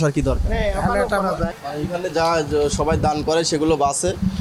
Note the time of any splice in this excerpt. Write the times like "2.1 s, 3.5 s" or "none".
1.5 s